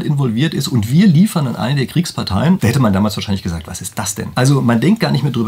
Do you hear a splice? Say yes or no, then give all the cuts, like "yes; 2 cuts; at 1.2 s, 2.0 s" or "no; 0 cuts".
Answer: yes; 2 cuts; at 2.6 s, 4.2 s